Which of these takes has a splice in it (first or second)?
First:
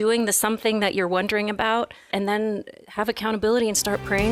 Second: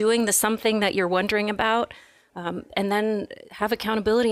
first